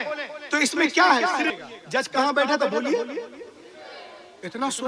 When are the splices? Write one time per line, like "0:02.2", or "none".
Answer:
0:01.6